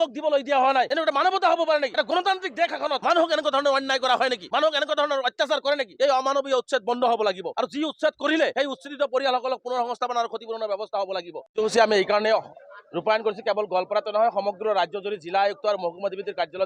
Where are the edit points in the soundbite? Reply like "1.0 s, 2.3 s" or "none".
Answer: 0.9 s, 1.9 s, 3.0 s, 4.4 s, 5.9 s, 7.5 s, 8.5 s, 11.4 s